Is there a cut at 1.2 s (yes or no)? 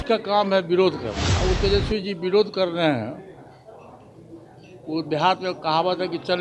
yes